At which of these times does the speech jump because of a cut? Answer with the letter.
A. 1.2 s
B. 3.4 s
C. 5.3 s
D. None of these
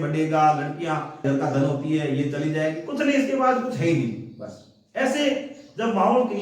A